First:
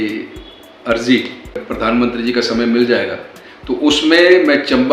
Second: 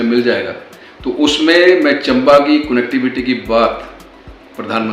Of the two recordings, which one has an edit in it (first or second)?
first